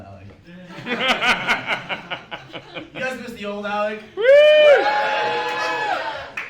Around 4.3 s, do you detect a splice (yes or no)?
no